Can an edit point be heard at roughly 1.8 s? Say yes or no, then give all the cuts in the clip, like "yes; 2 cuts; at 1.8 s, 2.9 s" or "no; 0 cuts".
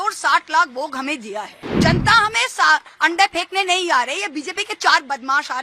yes; 1 cut; at 1.8 s